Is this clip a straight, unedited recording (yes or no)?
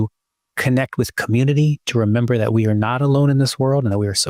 yes